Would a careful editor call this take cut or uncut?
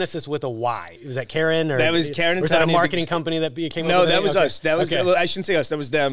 cut